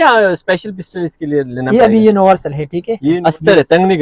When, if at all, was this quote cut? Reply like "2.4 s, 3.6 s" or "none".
3.1 s